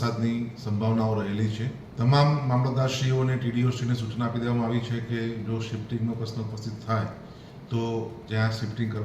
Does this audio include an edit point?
yes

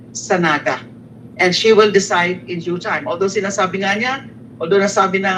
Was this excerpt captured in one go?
yes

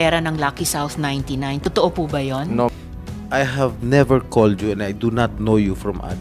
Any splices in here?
yes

